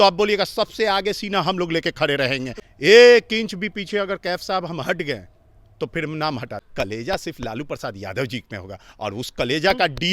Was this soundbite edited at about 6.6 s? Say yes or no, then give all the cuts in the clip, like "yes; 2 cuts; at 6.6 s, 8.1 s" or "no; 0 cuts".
yes; 2 cuts; at 2.5 s, 6.6 s